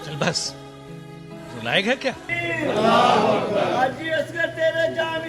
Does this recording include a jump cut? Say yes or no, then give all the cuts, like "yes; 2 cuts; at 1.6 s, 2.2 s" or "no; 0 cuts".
yes; 1 cut; at 2.3 s